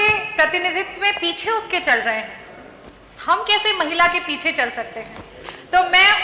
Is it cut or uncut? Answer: uncut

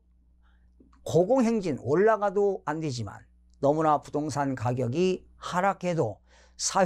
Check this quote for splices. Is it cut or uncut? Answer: uncut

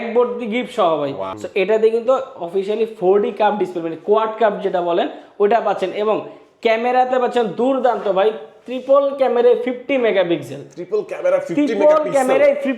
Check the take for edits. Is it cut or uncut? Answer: cut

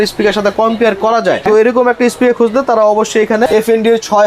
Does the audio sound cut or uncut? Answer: cut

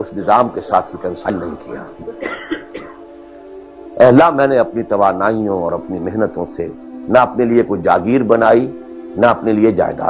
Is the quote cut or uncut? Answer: cut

